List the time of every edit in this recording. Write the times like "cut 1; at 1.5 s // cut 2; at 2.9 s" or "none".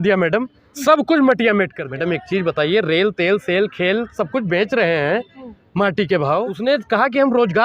cut 1; at 1.8 s // cut 2; at 6.6 s